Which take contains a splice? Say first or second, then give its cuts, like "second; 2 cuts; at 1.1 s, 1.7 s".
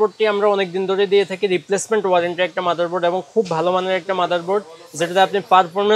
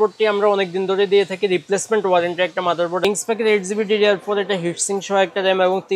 second; 1 cut; at 3.0 s